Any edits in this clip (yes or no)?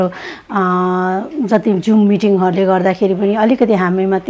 no